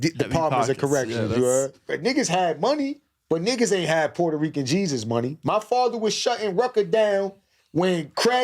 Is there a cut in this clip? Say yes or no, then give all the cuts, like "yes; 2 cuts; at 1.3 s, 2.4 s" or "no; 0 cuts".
yes; 1 cut; at 1.9 s